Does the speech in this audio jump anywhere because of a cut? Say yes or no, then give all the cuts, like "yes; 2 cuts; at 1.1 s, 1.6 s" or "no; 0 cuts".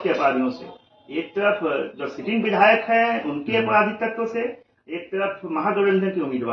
no; 0 cuts